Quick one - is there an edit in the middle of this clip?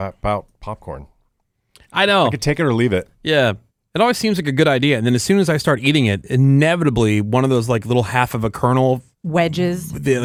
no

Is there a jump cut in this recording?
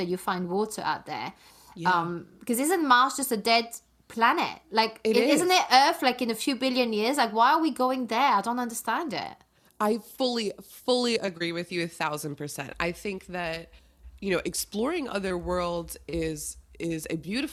no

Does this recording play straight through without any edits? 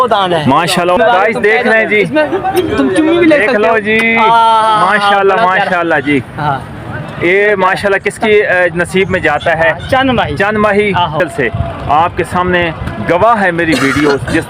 no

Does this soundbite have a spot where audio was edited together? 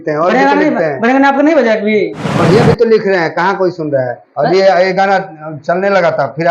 yes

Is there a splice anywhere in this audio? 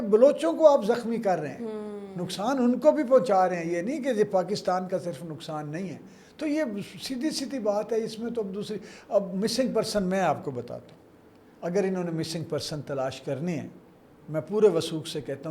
no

